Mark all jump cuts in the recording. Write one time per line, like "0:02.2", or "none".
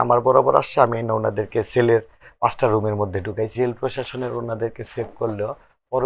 0:03.5